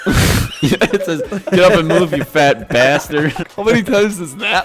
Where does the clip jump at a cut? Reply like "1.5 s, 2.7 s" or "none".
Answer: 3.4 s

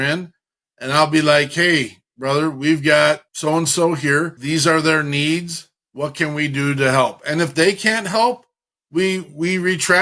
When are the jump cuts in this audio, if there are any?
3.3 s, 4.4 s

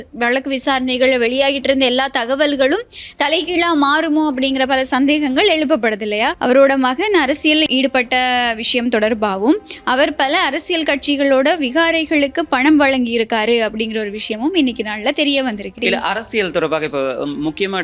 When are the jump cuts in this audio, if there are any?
6.4 s, 15.8 s

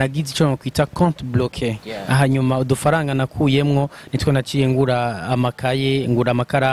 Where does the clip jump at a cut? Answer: none

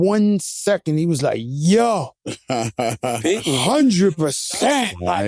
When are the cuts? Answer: none

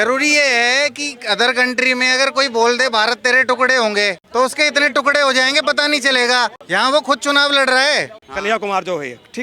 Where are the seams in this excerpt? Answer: 4.2 s, 6.6 s, 8.3 s

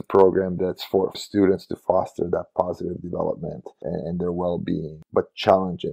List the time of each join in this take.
0.9 s, 3.8 s, 5.0 s

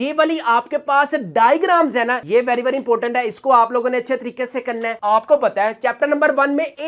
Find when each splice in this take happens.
5.0 s

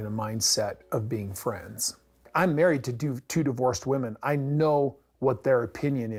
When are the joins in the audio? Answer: none

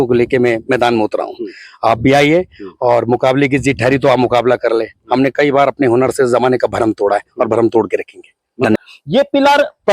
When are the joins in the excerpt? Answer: 8.8 s

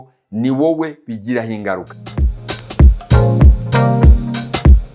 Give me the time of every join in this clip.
2.3 s

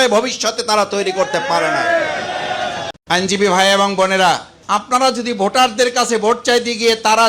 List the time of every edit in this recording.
2.9 s, 4.5 s

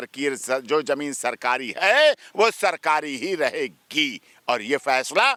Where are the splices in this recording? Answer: none

